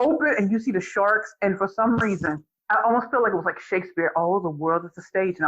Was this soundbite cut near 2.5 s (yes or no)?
yes